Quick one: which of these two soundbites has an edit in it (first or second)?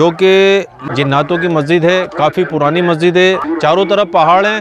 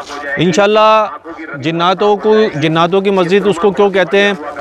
first